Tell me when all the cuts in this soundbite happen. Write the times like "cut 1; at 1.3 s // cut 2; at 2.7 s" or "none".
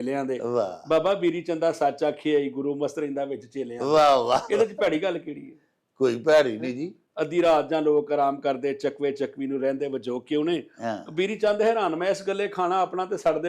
none